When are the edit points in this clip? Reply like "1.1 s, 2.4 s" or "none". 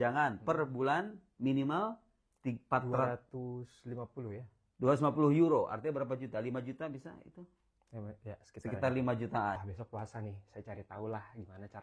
9.6 s